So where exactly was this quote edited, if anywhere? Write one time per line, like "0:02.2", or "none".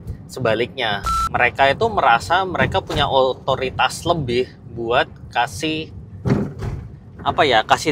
0:01.1